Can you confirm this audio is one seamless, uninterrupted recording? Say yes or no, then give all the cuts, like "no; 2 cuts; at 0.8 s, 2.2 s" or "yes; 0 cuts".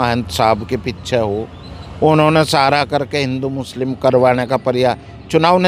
yes; 0 cuts